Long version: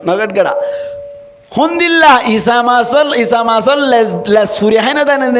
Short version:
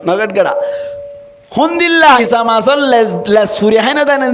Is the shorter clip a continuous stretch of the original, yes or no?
no